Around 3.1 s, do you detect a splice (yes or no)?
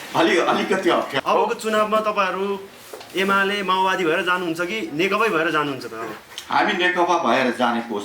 no